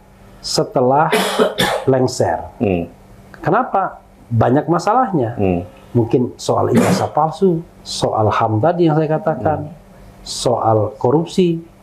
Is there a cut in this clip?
no; 0 cuts

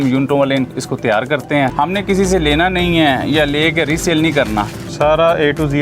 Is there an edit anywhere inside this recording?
yes; 2 cuts; at 1.7 s, 4.8 s

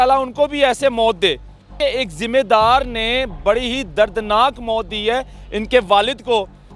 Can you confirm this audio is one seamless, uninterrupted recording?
no; 1 cut; at 1.8 s

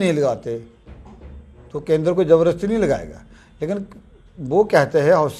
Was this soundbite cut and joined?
no; 0 cuts

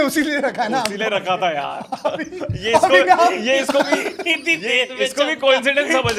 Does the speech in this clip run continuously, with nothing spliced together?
yes; 0 cuts

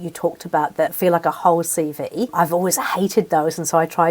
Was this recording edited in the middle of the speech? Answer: yes; 2 cuts; at 0.9 s, 2.3 s

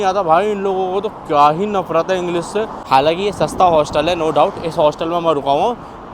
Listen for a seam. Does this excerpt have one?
yes; 1 cut; at 2.8 s

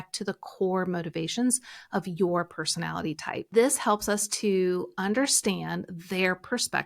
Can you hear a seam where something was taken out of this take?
yes; 1 cut; at 3.5 s

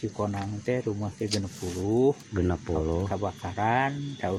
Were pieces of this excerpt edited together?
no; 0 cuts

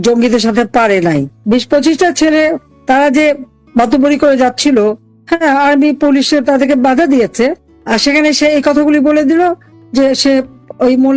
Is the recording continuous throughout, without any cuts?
yes; 0 cuts

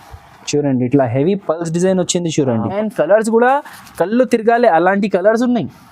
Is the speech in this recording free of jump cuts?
no; 1 cut; at 2.7 s

